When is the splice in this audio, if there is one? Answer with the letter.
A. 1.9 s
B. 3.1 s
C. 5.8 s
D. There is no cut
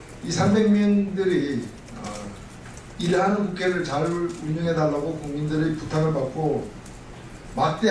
B